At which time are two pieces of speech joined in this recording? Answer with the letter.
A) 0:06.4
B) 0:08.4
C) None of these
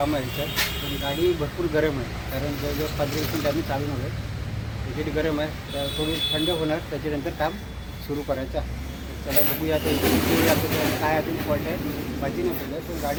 C